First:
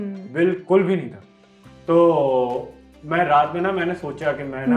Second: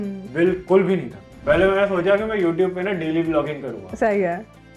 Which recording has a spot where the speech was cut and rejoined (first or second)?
second